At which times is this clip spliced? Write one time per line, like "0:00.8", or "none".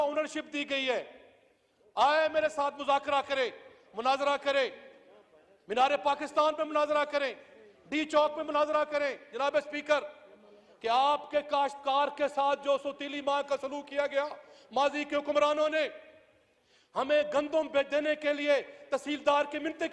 none